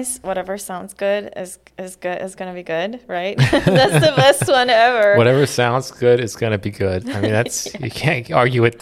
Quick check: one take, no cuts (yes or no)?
yes